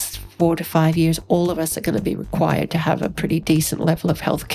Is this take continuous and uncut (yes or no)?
yes